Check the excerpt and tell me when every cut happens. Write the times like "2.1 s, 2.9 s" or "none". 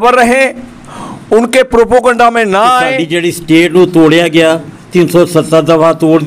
3.0 s